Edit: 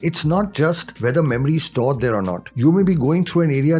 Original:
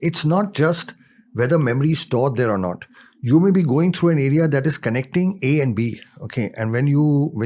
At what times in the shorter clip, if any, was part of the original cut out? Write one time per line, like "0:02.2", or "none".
0:00.9
0:02.4